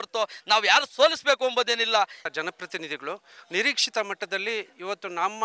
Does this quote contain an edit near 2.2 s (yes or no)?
yes